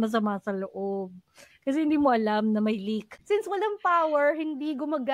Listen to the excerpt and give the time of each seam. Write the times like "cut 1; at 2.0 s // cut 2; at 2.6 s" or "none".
cut 1; at 3.1 s